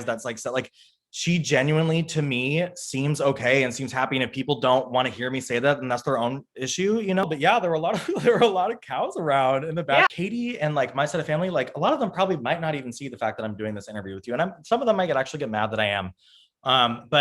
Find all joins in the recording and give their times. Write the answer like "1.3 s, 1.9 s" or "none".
7.2 s, 10.1 s